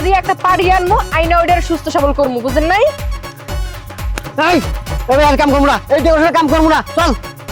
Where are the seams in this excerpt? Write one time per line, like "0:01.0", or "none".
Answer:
none